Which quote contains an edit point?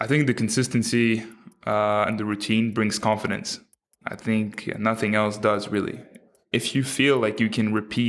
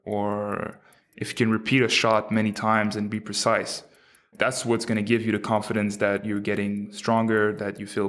second; 1 cut; at 4.3 s

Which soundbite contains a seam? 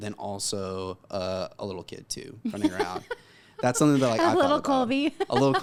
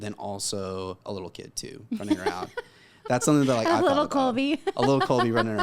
second; 1 cut; at 1.0 s

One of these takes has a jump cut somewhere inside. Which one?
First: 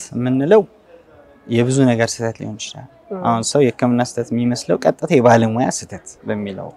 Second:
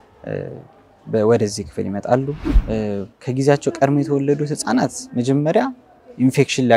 second; 1 cut; at 2.6 s

